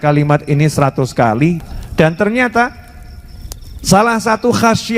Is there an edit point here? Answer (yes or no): yes